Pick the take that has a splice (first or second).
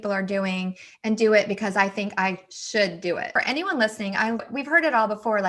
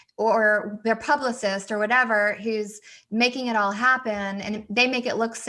first